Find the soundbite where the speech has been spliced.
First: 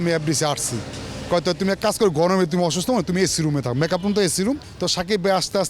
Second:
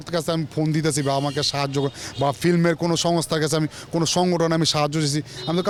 first; 1 cut; at 4.7 s

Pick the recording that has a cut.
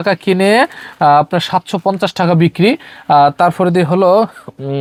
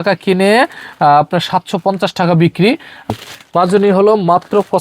second; 1 cut; at 3.1 s

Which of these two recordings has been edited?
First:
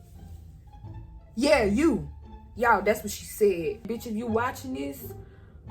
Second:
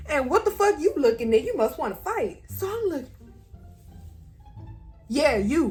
first; 1 cut; at 3.9 s

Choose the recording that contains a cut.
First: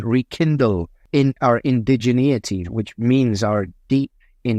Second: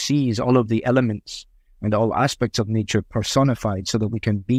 first; 2 cuts; at 0.9 s, 2.6 s

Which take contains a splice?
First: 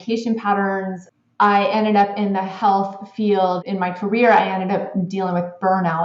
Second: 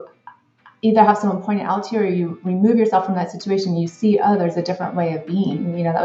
first; 2 cuts; at 1.0 s, 3.6 s

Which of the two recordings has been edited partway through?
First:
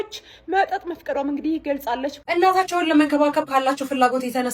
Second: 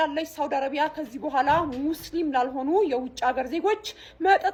first; 1 cut; at 2.2 s

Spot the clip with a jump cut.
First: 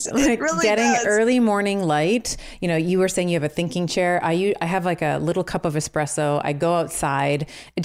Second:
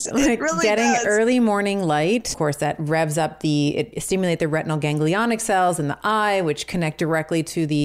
second; 2 cuts; at 2.3 s, 4.0 s

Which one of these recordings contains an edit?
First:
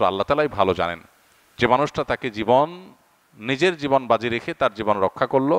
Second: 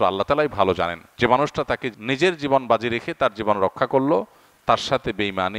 second; 2 cuts; at 1.0 s, 1.9 s

